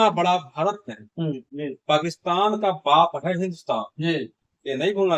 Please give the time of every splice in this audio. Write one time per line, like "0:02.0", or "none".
0:01.5